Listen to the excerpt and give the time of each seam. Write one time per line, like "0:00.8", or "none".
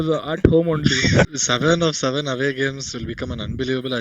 0:01.3